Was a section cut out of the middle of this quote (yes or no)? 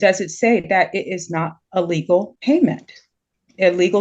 yes